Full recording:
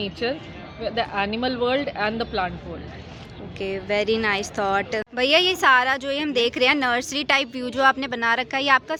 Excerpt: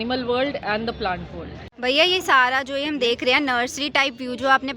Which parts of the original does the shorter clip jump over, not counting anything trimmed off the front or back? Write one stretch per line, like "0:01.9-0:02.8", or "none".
0:03.1-0:05.1